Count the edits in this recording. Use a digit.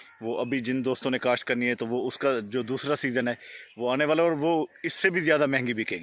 0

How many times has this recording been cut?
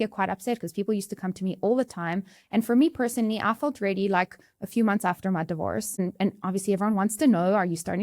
1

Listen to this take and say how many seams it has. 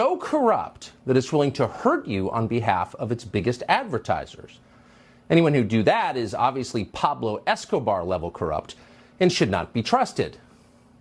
0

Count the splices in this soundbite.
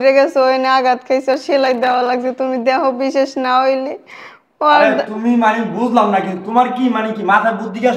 0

